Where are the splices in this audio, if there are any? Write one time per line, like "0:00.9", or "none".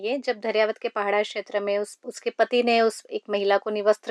0:02.0